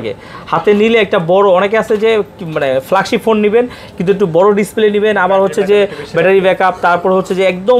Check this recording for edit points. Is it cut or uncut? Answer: uncut